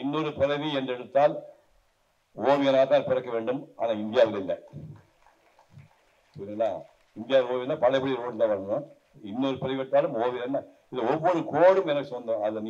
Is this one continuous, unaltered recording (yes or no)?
yes